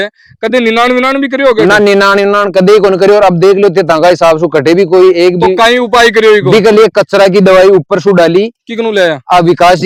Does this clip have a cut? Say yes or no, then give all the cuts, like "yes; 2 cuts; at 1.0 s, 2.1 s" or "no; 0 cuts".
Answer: no; 0 cuts